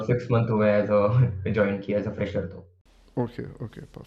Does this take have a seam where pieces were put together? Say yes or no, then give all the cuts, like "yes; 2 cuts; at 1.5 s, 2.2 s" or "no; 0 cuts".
no; 0 cuts